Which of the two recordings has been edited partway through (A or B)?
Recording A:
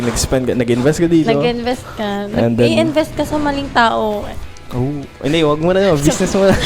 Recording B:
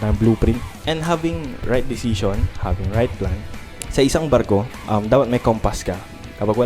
B